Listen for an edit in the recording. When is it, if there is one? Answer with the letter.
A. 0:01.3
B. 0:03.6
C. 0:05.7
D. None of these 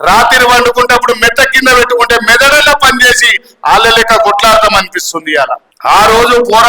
C